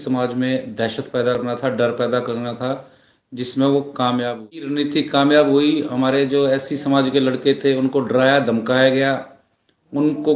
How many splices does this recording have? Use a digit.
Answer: 2